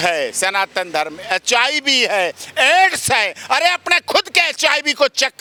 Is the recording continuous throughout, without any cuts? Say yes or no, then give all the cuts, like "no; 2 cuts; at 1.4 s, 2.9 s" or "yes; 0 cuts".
yes; 0 cuts